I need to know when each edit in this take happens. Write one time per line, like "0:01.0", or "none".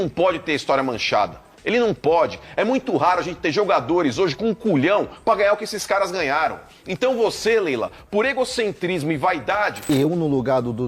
0:09.8